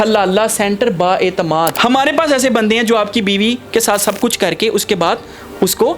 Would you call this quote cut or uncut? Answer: cut